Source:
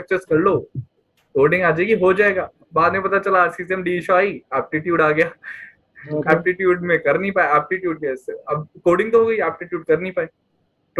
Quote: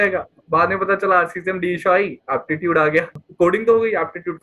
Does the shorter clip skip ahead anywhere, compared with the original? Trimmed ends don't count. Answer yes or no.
yes